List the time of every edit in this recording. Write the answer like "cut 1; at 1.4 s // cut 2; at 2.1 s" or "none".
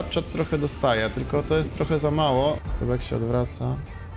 cut 1; at 2.7 s